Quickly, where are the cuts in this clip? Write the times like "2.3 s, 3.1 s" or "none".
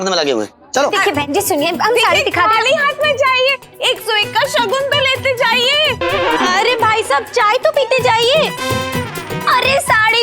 0.9 s